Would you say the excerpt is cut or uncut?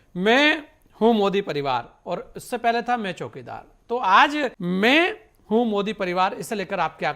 cut